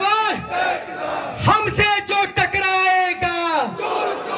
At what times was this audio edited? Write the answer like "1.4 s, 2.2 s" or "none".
none